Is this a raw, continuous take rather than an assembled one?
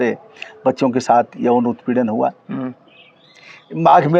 yes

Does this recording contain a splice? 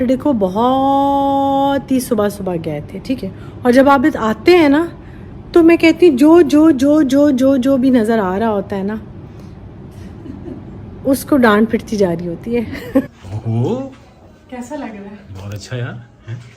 yes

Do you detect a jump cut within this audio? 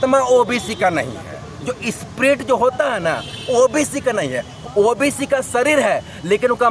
no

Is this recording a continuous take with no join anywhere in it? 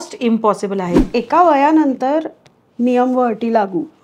no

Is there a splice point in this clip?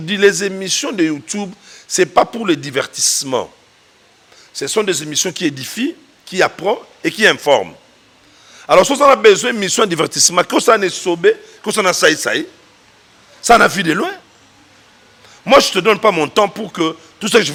no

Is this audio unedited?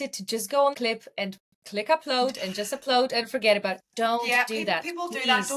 no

